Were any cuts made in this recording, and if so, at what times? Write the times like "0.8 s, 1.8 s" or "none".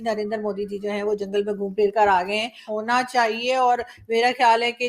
2.7 s